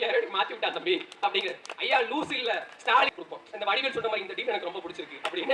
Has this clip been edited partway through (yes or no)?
yes